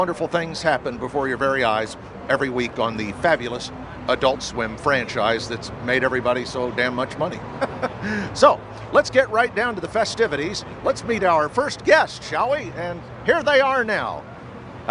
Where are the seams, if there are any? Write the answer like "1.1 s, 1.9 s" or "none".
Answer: 2.5 s